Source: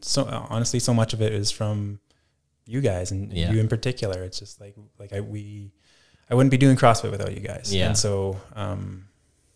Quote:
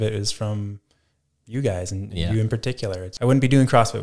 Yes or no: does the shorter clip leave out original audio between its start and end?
yes